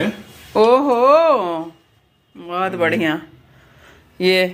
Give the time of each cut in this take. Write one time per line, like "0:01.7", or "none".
none